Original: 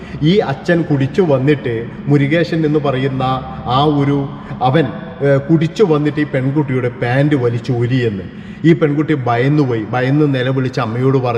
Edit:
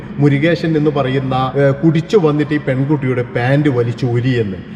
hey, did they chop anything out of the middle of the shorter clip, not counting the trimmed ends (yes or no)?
yes